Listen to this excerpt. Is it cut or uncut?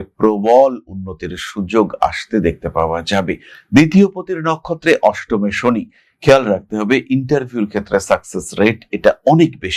cut